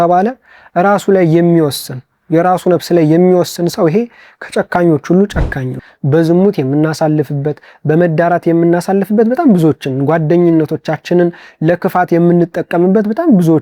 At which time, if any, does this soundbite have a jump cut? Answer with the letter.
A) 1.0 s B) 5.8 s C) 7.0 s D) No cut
B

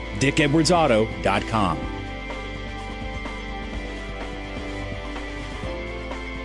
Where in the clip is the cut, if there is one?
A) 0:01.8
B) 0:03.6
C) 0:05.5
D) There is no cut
A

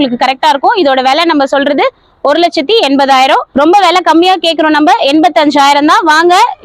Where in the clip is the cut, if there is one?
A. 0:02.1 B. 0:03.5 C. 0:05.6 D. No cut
B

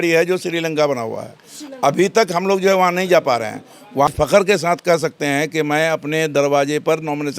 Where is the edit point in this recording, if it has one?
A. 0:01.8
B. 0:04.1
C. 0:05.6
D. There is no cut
B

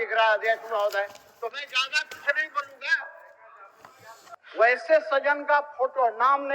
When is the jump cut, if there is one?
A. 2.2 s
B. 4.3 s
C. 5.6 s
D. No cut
B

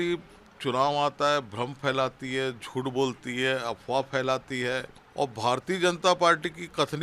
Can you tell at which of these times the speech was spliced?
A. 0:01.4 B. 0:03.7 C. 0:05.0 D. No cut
C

